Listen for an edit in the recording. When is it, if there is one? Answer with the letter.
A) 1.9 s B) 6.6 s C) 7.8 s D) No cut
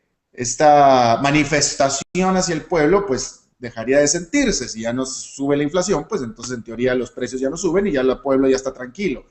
C